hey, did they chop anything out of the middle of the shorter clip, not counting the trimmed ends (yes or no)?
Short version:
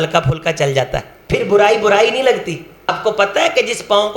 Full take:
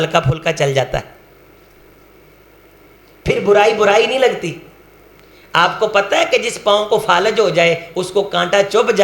yes